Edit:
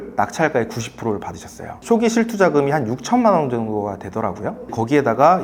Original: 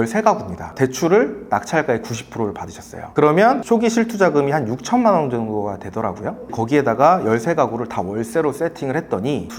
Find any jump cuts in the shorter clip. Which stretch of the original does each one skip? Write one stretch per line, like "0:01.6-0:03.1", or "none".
0:03.1-0:03.6